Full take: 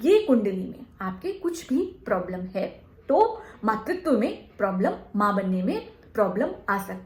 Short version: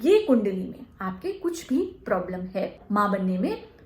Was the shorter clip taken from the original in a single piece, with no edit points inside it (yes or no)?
no